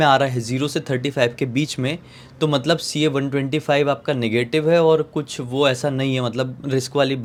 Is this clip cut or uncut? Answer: uncut